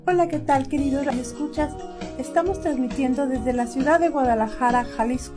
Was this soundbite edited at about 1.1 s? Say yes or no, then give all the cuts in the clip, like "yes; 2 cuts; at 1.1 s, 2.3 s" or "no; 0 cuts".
yes; 1 cut; at 1.1 s